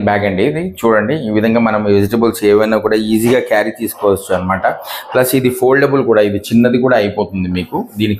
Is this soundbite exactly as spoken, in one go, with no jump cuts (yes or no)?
yes